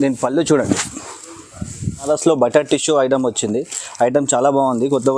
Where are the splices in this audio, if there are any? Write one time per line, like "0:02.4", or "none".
0:02.1